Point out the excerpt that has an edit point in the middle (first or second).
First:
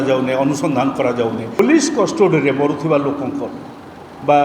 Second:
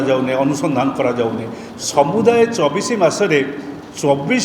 first